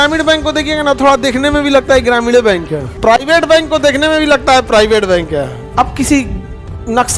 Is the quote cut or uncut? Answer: cut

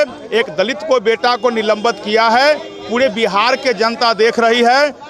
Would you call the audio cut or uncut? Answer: uncut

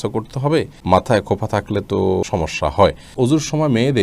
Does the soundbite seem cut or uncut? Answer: cut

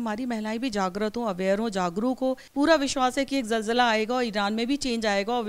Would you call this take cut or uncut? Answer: cut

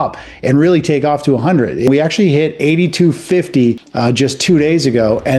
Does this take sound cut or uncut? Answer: cut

